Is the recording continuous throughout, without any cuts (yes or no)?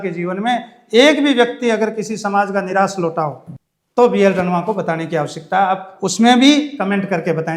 yes